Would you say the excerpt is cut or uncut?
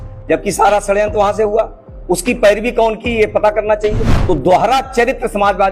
cut